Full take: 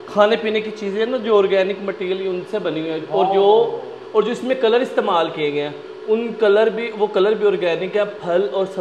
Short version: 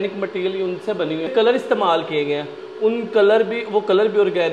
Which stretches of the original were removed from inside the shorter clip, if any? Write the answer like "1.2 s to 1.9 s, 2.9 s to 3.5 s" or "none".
3.0 s to 4.6 s